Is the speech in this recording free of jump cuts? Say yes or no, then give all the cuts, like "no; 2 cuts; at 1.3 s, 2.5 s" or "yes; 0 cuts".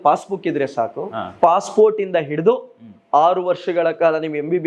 yes; 0 cuts